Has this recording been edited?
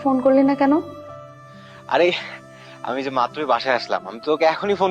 no; 0 cuts

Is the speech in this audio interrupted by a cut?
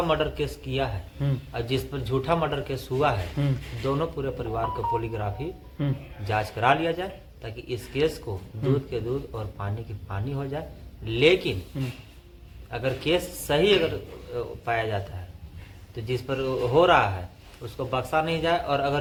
no; 0 cuts

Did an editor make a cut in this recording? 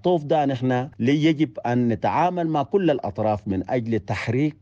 yes; 1 cut; at 0.9 s

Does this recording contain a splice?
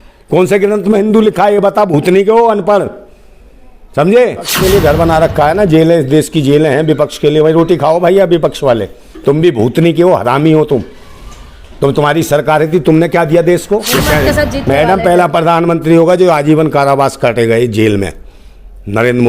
yes; 2 cuts; at 4.5 s, 13.9 s

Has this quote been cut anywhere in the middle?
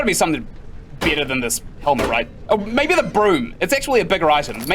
yes; 1 cut; at 2.4 s

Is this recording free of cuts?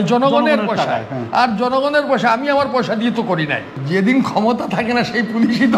no; 1 cut; at 3.8 s

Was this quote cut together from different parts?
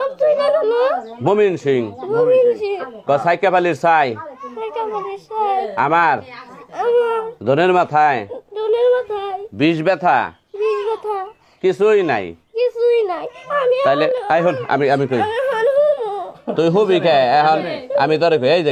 no; 0 cuts

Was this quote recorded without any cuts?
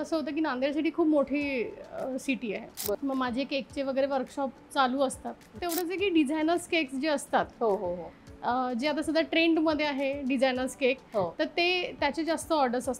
no; 2 cuts; at 3.0 s, 5.5 s

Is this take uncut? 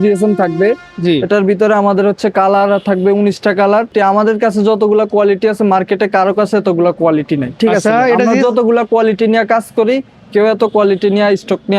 no; 1 cut; at 3.9 s

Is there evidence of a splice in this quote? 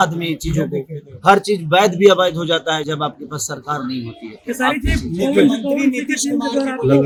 no; 0 cuts

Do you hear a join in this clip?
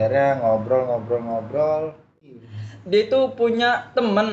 yes; 1 cut; at 2.2 s

